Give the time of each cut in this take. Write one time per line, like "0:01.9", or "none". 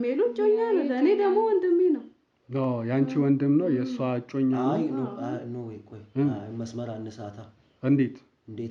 none